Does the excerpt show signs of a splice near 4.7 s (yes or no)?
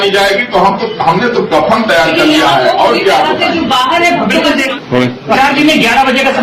no